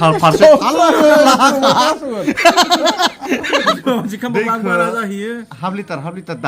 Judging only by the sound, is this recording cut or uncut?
cut